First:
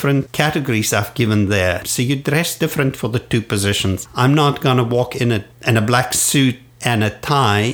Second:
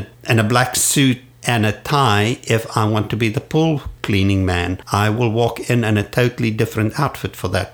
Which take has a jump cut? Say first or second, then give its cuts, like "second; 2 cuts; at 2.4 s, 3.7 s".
first; 1 cut; at 1.9 s